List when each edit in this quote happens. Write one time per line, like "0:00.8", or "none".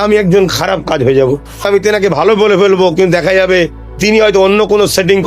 0:01.6